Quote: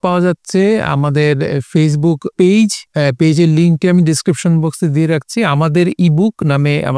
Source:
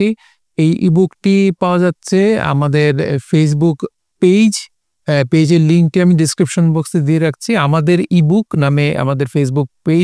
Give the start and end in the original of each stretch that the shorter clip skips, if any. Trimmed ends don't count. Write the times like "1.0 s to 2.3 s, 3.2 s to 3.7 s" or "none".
3.8 s to 4.1 s, 4.7 s to 5.0 s